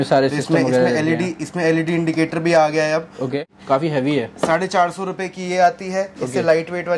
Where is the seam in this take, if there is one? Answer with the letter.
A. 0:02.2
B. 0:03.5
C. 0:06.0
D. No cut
B